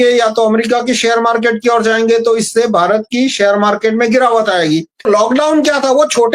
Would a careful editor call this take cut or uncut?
cut